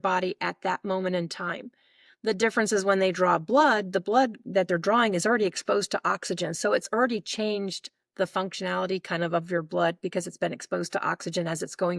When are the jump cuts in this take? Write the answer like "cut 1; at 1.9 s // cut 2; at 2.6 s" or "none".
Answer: none

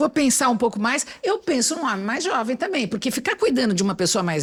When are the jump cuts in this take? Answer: none

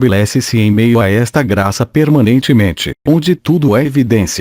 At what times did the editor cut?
cut 1; at 1.5 s // cut 2; at 2.4 s

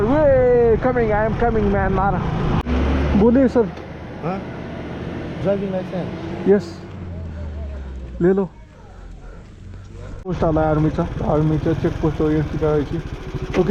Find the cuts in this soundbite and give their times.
cut 1; at 2.6 s // cut 2; at 10.2 s

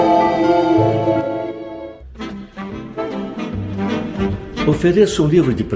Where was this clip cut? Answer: cut 1; at 2.0 s

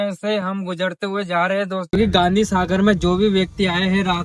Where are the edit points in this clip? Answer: cut 1; at 1.9 s

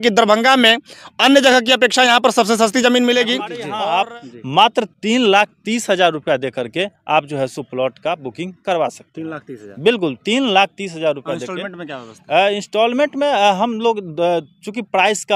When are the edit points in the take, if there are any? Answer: cut 1; at 3.6 s

